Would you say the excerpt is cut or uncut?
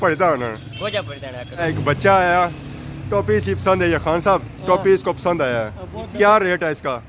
cut